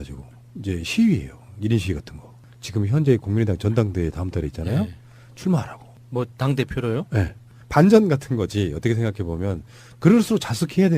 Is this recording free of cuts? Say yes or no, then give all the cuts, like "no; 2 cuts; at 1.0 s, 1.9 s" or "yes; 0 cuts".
no; 1 cut; at 9.9 s